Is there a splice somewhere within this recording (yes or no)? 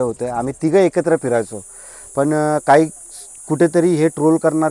no